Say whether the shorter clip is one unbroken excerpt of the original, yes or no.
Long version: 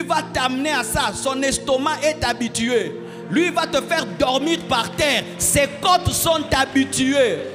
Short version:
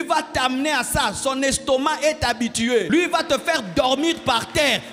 no